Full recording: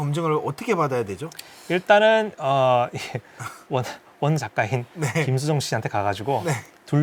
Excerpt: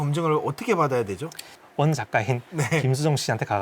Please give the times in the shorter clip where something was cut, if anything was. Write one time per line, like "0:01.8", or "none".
0:01.5